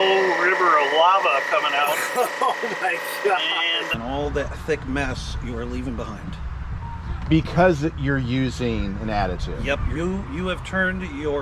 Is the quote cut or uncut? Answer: cut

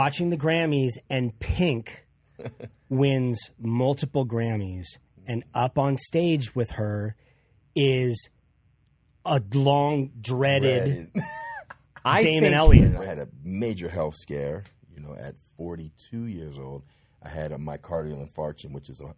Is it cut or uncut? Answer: cut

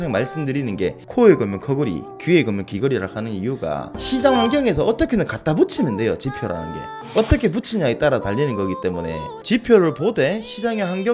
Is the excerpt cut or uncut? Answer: cut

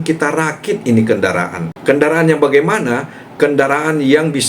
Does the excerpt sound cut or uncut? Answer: cut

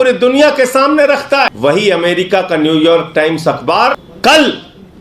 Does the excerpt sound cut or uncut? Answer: cut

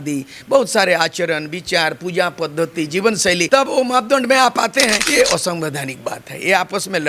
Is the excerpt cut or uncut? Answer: cut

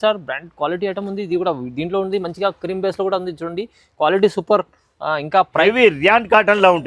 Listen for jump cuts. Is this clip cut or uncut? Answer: cut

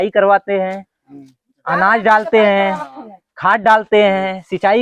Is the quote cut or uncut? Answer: uncut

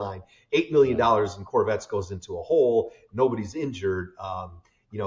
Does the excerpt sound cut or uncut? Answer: uncut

